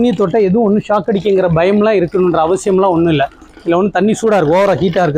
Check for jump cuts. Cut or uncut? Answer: uncut